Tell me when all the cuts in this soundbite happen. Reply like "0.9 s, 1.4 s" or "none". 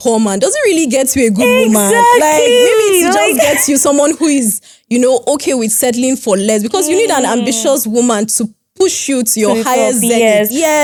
none

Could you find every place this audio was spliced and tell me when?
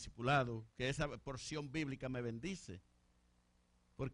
none

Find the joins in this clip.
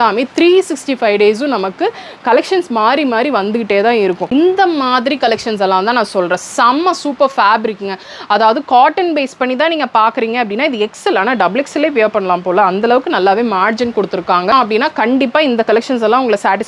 4.3 s, 14.5 s

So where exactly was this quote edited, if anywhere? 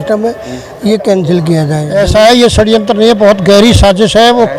1.8 s

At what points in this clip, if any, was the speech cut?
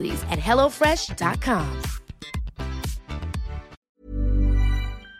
3.8 s

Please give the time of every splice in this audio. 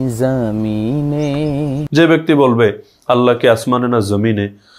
1.8 s

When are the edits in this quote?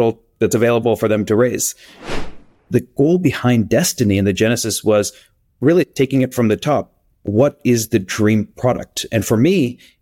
2.4 s

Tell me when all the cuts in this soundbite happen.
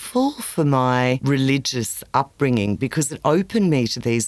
1.2 s

